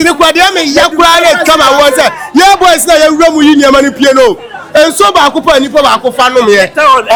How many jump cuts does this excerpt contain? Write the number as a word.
zero